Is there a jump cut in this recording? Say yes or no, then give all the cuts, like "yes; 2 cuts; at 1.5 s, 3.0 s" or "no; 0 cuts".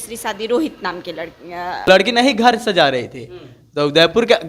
yes; 1 cut; at 1.9 s